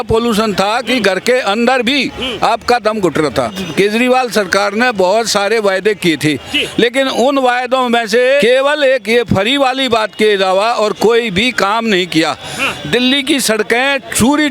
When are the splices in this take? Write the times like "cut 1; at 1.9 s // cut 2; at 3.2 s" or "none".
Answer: cut 1; at 3.6 s // cut 2; at 8.4 s